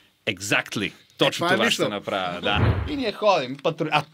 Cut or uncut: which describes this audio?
cut